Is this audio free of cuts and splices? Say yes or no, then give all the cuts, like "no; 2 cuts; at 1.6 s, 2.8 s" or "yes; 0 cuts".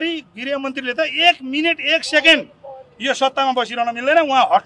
yes; 0 cuts